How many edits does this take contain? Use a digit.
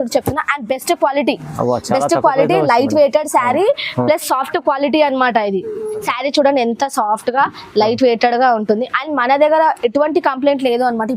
1